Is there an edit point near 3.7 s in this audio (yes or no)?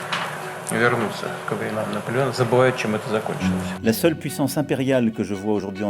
yes